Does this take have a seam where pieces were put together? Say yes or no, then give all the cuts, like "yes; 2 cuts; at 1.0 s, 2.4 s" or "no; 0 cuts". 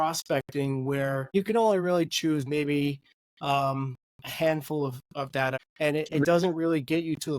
yes; 2 cuts; at 1.3 s, 5.6 s